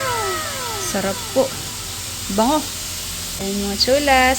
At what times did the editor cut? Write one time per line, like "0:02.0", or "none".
0:03.4